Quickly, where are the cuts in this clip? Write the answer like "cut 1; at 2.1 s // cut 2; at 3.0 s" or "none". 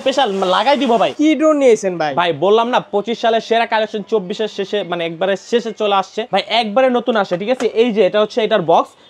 cut 1; at 1.1 s // cut 2; at 6.2 s